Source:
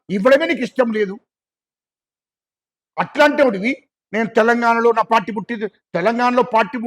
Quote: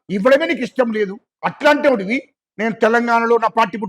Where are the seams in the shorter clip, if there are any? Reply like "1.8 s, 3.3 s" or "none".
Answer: 1.3 s

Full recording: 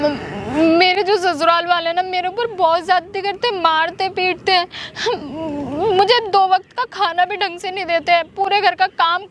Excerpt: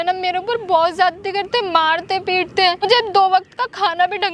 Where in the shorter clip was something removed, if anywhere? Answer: 2.8 s

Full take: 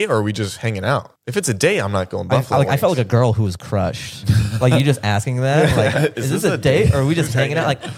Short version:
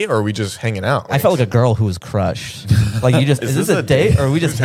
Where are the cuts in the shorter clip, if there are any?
1.1 s, 3.4 s

